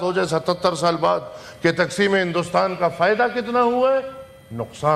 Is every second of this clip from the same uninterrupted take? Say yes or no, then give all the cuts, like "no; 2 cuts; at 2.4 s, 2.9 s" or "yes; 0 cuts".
yes; 0 cuts